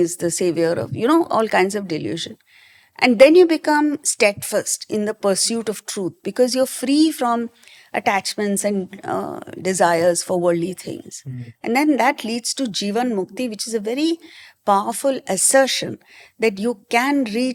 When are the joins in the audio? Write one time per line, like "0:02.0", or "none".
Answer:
none